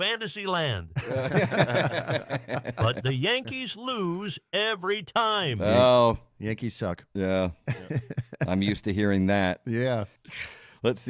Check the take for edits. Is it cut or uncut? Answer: cut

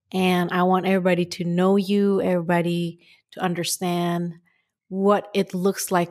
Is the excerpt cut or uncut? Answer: uncut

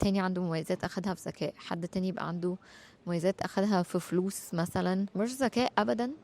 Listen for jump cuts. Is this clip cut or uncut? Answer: cut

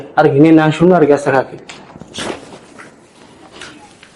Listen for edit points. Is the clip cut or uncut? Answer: uncut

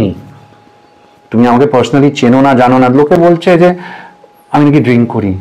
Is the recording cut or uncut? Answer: uncut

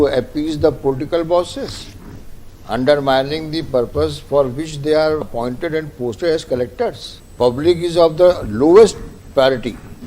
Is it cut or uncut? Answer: cut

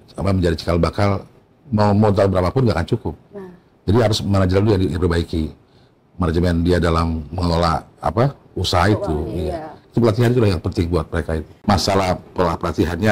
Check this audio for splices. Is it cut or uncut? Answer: cut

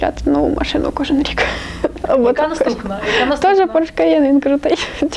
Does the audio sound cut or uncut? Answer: uncut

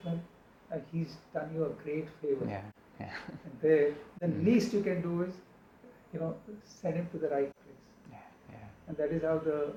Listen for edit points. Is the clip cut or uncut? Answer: uncut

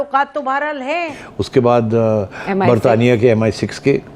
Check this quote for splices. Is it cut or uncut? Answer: cut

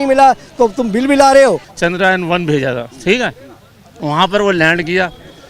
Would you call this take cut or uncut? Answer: cut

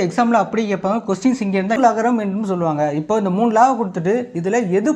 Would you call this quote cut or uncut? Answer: cut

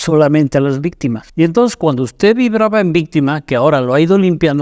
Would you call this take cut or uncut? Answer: cut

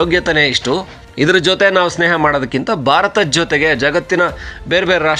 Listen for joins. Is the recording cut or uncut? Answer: cut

